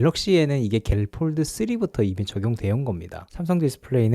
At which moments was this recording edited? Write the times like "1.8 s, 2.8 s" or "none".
3.2 s